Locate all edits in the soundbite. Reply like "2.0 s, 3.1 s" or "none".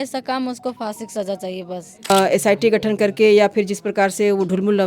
2.1 s